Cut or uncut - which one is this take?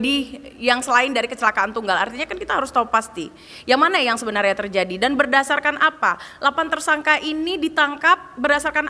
uncut